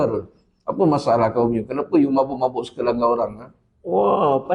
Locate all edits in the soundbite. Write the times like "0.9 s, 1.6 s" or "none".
none